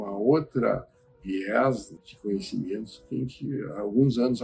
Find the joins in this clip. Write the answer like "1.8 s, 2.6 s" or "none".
none

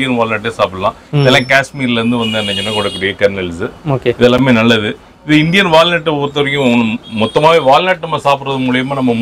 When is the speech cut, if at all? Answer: none

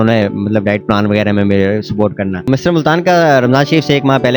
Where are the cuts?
2.5 s

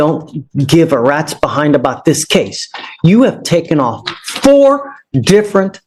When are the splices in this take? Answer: none

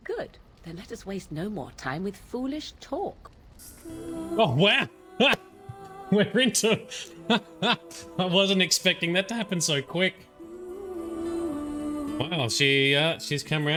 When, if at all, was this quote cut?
none

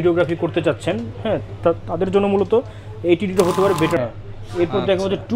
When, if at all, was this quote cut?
4.0 s

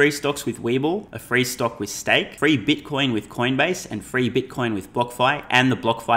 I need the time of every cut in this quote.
1.1 s, 2.3 s

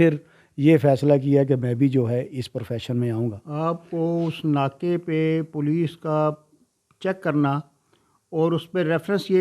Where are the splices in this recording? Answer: none

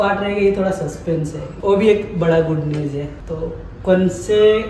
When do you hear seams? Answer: 1.5 s, 3.2 s

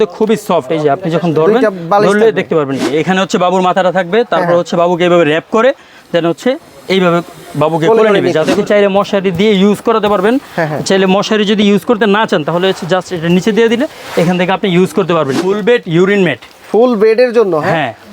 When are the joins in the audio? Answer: 2.9 s, 8.6 s, 15.4 s

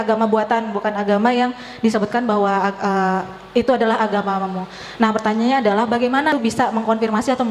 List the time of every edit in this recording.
6.3 s

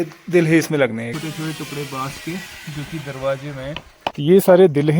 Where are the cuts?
1.1 s, 4.2 s

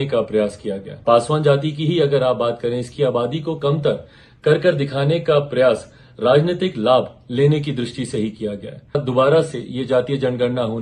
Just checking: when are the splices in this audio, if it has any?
0.9 s, 8.9 s

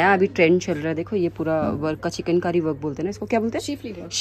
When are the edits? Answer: none

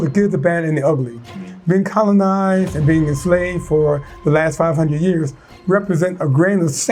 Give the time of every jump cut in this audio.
none

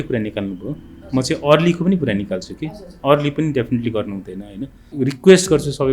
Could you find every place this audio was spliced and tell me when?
4.9 s

